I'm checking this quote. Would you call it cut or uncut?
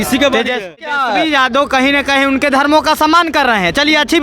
cut